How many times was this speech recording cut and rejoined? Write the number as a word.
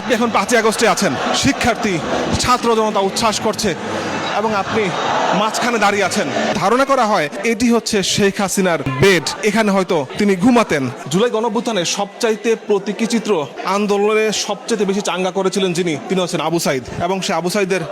three